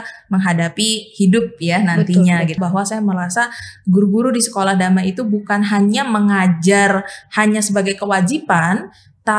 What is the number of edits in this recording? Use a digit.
1